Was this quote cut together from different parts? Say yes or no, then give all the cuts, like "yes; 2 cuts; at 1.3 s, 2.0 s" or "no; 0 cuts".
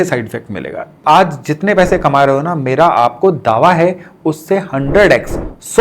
yes; 1 cut; at 1.0 s